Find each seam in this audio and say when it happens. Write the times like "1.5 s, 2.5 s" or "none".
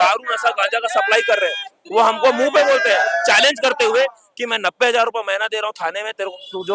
none